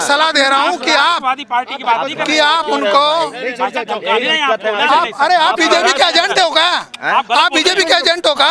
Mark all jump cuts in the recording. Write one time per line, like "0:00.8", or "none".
none